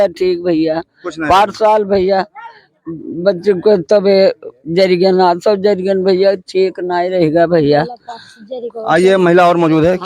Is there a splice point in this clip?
no; 0 cuts

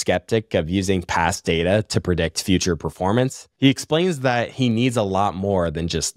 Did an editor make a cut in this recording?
yes; 1 cut; at 3.4 s

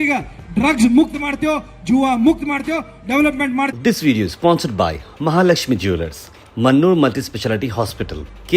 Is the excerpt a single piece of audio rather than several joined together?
no; 1 cut; at 3.7 s

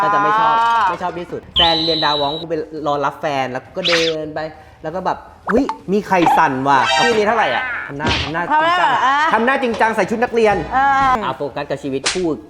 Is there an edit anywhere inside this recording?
yes; 3 cuts; at 1.4 s, 7.1 s, 11.1 s

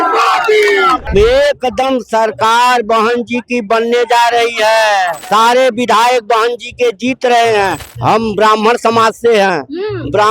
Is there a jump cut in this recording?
yes; 3 cuts; at 1.1 s, 5.2 s, 7.9 s

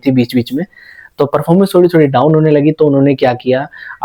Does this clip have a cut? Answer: no; 0 cuts

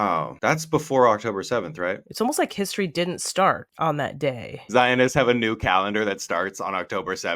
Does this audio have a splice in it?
yes; 2 cuts; at 2.1 s, 4.5 s

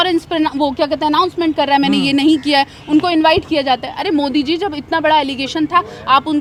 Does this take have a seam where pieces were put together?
no; 0 cuts

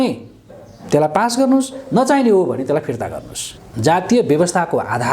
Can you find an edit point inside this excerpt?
yes; 1 cut; at 3.5 s

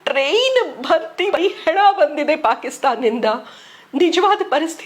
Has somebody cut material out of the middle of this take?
yes; 1 cut; at 1.3 s

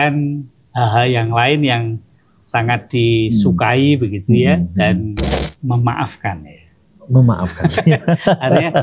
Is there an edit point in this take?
yes; 1 cut; at 5.5 s

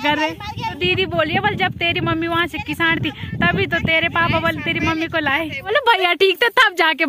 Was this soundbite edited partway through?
yes; 2 cuts; at 0.8 s, 5.7 s

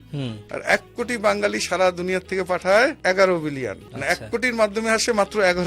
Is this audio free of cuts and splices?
no; 2 cuts; at 3.0 s, 3.9 s

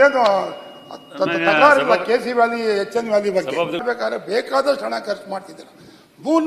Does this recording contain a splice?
yes; 1 cut; at 3.8 s

